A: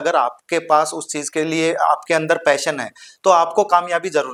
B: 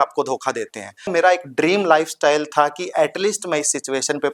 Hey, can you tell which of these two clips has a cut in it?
B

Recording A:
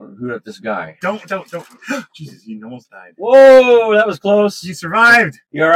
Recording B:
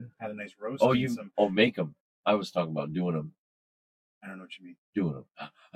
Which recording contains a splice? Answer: A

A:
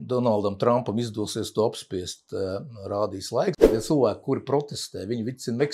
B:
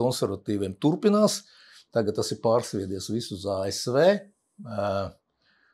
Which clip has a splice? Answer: A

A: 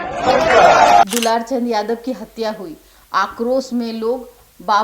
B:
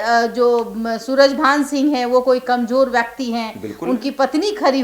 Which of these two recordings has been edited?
A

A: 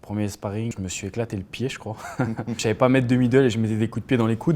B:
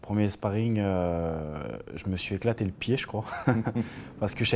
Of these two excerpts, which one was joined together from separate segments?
A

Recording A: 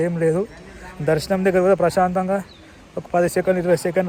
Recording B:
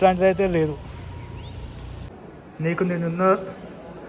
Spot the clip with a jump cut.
B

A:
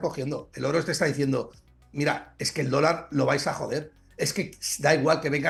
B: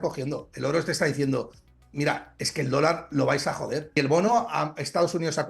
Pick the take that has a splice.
B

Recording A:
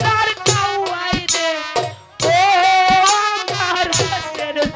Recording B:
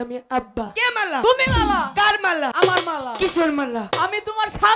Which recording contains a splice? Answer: B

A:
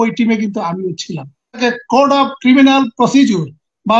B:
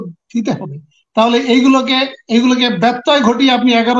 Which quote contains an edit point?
A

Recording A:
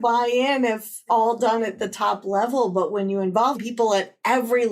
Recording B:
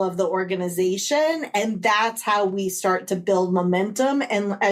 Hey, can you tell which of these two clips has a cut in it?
A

